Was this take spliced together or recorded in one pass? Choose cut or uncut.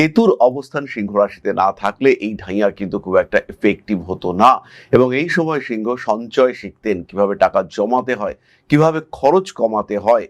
uncut